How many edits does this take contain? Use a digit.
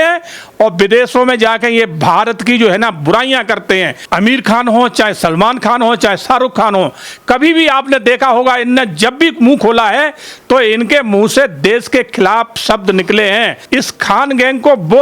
2